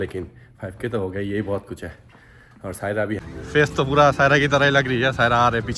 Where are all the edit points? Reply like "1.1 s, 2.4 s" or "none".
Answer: 3.2 s